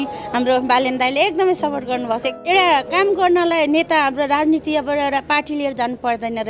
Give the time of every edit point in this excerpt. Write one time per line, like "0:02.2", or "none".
0:02.3